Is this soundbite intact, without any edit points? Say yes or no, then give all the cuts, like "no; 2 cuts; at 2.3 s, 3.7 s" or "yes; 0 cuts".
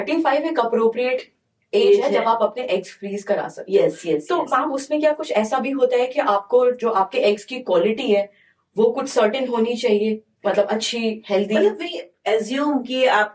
yes; 0 cuts